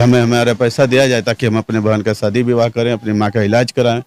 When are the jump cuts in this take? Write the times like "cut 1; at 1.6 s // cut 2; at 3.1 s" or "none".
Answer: none

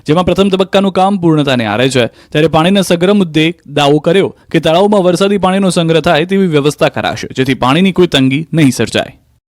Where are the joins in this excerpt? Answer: cut 1; at 4.1 s

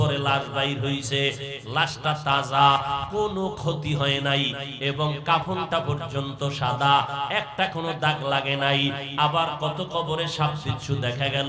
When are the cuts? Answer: none

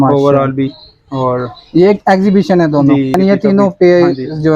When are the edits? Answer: cut 1; at 3.2 s

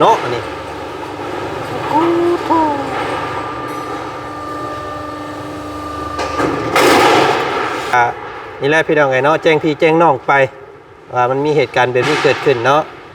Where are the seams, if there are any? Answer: cut 1; at 7.9 s

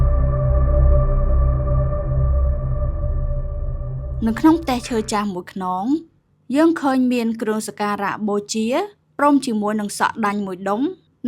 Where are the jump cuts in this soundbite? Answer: cut 1; at 4.1 s

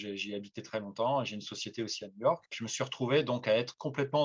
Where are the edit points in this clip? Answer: cut 1; at 2.6 s

